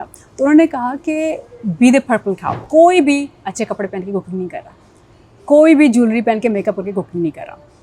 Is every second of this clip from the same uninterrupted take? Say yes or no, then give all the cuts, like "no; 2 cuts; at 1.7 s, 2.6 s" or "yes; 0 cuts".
no; 1 cut; at 2.6 s